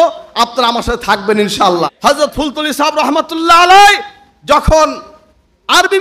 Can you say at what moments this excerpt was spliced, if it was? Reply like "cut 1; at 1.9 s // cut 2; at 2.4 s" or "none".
cut 1; at 1.9 s